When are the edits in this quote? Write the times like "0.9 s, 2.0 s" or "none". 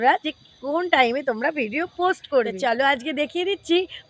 2.5 s